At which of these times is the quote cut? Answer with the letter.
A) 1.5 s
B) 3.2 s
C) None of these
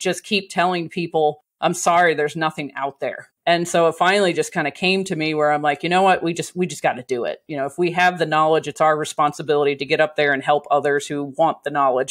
B